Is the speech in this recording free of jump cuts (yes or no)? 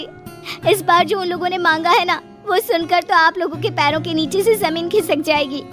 yes